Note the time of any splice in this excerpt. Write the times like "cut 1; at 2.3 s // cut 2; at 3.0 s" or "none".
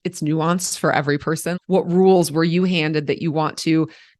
cut 1; at 1.5 s